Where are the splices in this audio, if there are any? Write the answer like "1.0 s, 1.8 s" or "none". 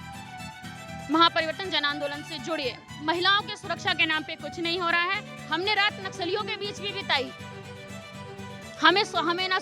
2.8 s

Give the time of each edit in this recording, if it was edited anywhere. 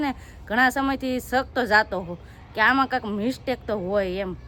none

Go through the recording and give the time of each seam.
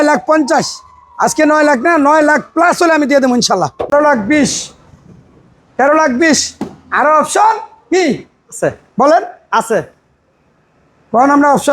3.9 s

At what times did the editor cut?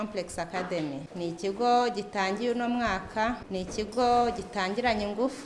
1.1 s, 3.4 s

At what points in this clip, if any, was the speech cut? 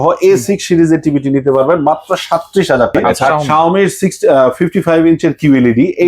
3.3 s

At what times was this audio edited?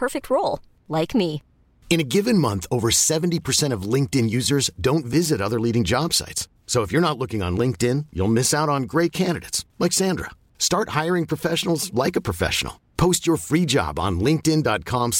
none

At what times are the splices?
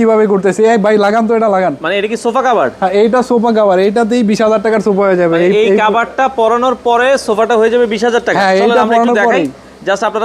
none

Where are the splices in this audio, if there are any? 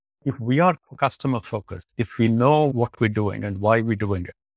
2.7 s

